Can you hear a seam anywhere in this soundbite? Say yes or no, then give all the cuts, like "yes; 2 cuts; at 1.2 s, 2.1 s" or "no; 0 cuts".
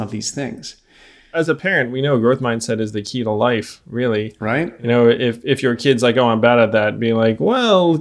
yes; 1 cut; at 1.3 s